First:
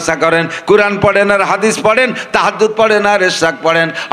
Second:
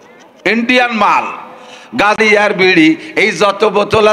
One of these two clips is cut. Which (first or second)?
second